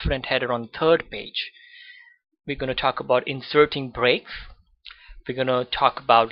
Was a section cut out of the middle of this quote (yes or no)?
yes